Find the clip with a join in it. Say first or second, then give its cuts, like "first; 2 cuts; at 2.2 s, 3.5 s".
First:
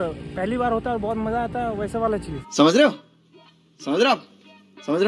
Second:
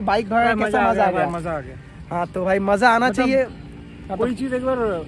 first; 1 cut; at 2.5 s